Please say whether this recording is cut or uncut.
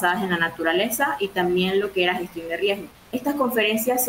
cut